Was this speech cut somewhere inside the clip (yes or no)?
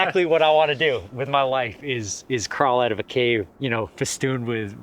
yes